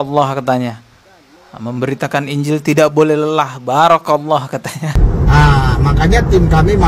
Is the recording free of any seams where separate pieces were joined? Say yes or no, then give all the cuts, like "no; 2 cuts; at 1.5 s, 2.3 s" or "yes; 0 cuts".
no; 1 cut; at 4.9 s